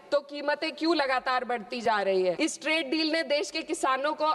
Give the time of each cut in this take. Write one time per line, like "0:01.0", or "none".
0:02.4